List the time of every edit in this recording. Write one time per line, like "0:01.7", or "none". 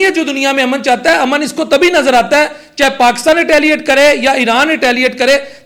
none

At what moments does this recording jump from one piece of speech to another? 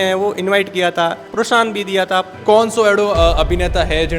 0:01.2
0:02.3

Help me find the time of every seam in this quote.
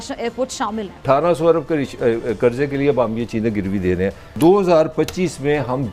0:01.0
0:04.3

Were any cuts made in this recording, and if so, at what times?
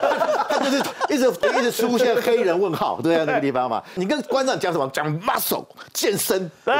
0:01.4
0:04.0

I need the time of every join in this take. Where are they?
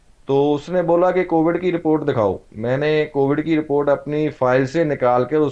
none

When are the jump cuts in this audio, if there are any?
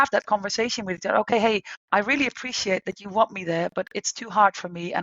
0:01.7

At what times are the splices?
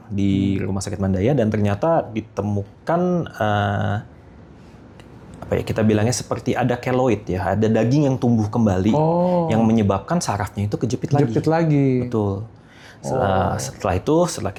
none

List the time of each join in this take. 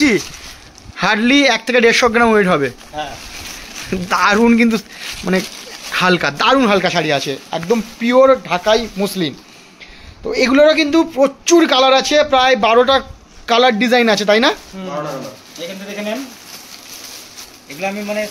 none

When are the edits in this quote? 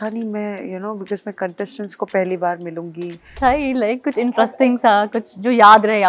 0:03.3

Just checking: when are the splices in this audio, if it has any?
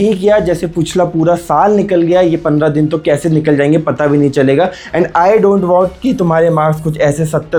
none

